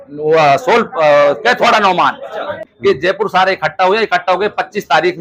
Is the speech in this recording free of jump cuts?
no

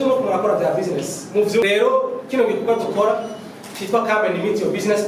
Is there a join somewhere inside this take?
yes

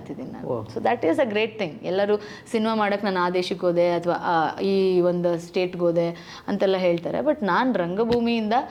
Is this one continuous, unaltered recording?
yes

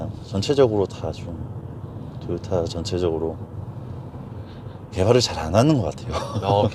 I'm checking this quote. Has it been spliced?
no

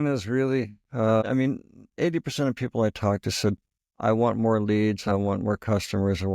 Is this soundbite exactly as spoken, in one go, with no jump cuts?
no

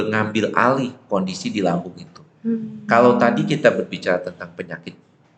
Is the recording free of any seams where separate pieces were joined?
yes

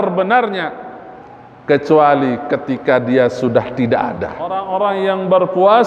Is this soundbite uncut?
no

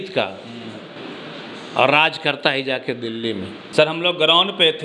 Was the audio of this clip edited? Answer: no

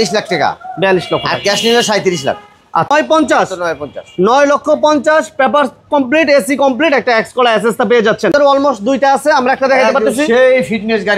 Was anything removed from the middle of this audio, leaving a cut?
yes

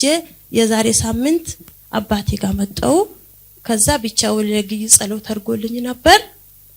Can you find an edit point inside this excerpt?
no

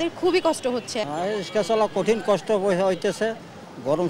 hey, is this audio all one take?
no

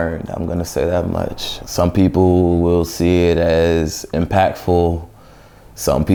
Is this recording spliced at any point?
no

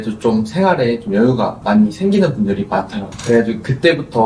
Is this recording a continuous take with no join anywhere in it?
no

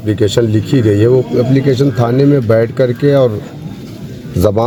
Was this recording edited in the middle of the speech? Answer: no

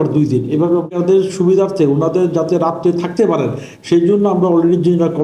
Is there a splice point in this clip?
yes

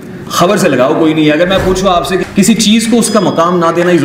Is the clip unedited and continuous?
no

